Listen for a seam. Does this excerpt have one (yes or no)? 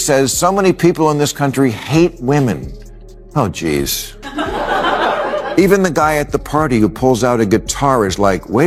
no